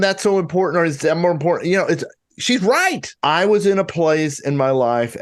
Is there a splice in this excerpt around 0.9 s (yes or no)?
no